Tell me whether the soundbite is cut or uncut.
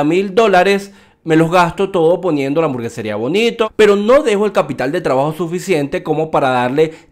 cut